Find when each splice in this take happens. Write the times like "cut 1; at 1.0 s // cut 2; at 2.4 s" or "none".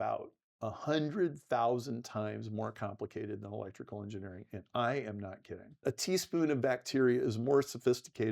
cut 1; at 5.8 s